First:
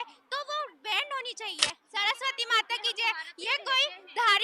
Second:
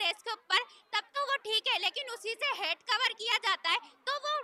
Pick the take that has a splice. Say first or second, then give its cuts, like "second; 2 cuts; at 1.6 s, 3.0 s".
first; 1 cut; at 1.8 s